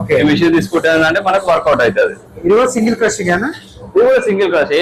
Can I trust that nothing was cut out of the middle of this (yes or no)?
yes